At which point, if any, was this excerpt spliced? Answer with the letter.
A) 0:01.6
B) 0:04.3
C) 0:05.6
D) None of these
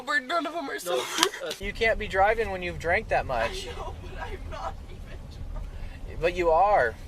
A